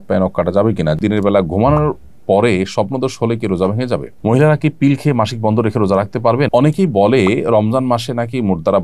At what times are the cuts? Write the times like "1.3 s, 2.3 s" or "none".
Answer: 1.0 s, 4.1 s, 6.5 s